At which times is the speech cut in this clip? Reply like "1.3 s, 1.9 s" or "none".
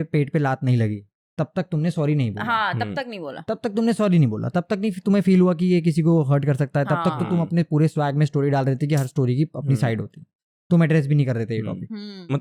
none